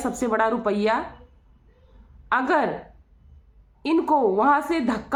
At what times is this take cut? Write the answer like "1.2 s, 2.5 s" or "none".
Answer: none